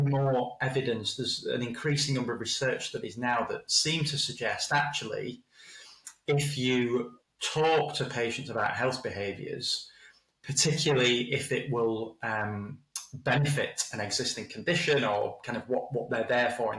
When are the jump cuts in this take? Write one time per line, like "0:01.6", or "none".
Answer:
none

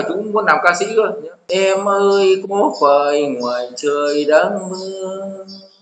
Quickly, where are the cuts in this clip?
0:01.3

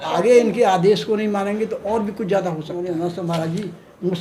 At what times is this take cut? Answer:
0:02.7

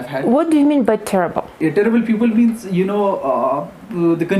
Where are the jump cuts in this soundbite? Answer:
0:01.5

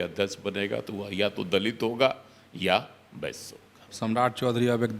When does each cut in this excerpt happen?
0:03.9

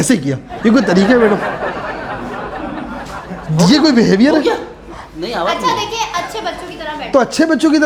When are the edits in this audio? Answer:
none

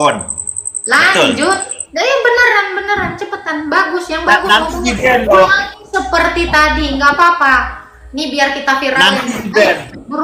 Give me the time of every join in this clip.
none

